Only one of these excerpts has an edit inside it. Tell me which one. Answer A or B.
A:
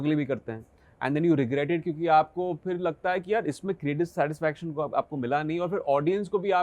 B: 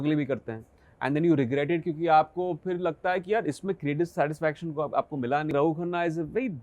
B